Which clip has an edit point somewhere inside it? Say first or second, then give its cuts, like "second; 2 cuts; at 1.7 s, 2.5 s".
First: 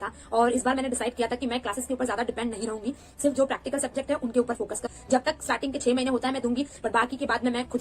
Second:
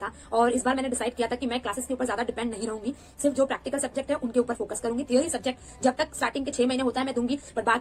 first; 1 cut; at 4.8 s